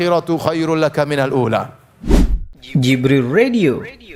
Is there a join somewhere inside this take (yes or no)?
yes